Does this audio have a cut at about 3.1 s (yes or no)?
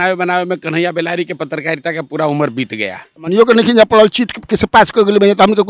yes